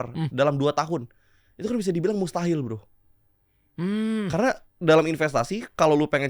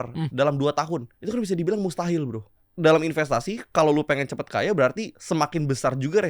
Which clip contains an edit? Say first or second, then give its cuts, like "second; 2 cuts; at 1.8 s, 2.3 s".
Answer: second; 3 cuts; at 1.1 s, 2.6 s, 5.1 s